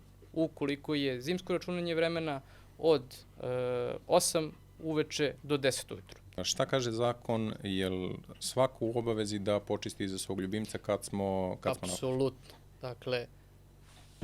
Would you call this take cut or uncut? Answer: cut